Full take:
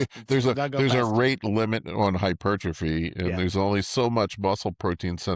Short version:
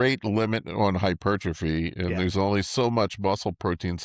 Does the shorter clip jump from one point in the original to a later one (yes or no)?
no